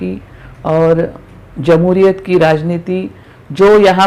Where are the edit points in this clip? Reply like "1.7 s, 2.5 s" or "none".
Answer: none